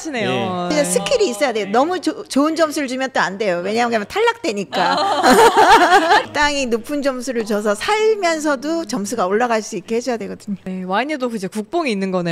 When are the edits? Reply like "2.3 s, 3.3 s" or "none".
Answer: 6.3 s

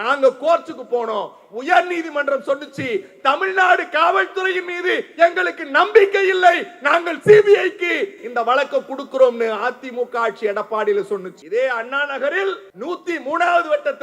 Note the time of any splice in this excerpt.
11.3 s, 12.7 s

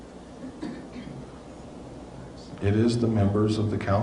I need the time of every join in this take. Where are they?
2.4 s

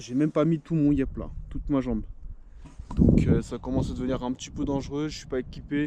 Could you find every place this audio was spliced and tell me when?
none

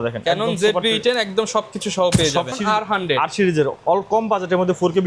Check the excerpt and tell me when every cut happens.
2.5 s

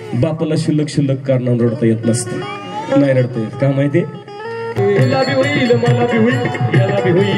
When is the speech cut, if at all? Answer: 4.8 s

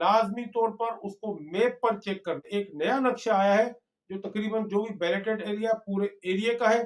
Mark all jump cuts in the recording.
2.5 s

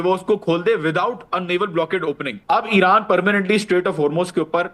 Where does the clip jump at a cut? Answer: 2.3 s

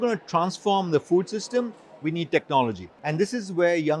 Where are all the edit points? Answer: 2.9 s

